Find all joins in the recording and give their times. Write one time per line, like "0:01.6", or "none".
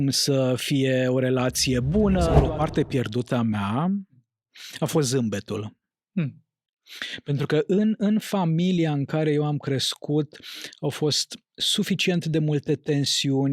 0:02.4

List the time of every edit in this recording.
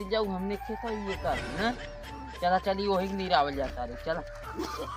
none

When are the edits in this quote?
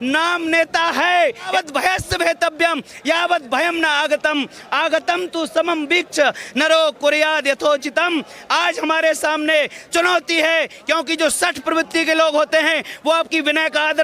0:01.5

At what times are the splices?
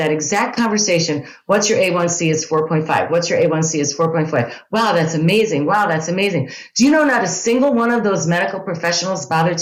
none

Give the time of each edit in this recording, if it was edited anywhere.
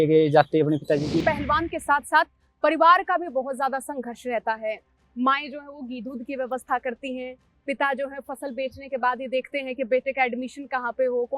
0:01.2

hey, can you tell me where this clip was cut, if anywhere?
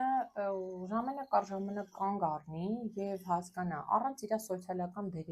none

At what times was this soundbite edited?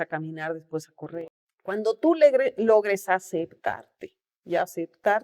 0:01.1

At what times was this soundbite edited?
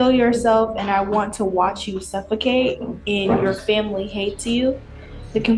none

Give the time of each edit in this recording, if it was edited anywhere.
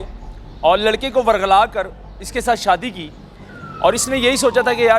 0:03.5

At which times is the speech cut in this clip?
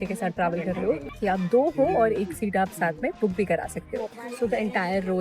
0:01.0
0:04.2

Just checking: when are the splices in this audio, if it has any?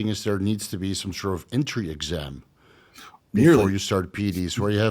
none

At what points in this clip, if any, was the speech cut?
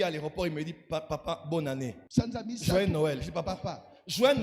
0:02.0

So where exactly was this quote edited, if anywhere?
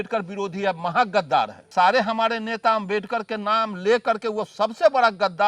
0:01.6

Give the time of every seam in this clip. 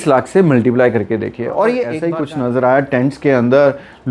0:02.0

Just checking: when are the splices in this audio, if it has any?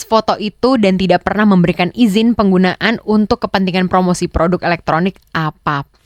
none

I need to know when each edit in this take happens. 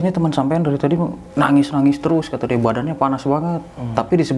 0:01.2

